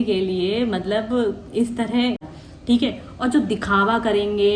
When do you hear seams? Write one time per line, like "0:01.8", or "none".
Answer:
0:02.2